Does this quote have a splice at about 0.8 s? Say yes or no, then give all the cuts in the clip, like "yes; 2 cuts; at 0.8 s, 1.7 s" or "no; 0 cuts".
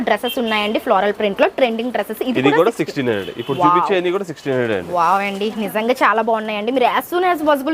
no; 0 cuts